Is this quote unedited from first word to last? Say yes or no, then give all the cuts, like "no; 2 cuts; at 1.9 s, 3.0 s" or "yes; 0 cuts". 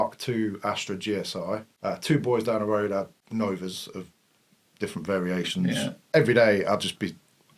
no; 3 cuts; at 1.7 s, 3.2 s, 6.0 s